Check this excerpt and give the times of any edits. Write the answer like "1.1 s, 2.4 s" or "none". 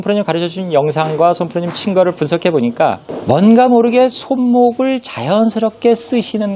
none